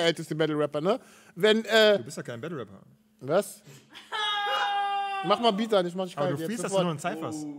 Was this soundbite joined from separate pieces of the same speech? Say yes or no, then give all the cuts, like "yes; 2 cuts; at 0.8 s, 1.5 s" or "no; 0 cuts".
no; 0 cuts